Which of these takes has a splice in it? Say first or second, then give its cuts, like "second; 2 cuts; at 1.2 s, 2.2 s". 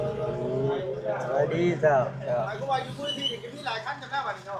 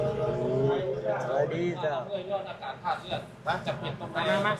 second; 1 cut; at 2.0 s